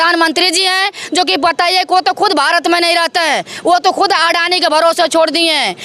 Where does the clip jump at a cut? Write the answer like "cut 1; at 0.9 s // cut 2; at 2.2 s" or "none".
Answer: none